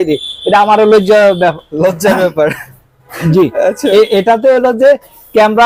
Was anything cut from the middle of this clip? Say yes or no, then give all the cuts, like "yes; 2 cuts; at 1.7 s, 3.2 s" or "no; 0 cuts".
no; 0 cuts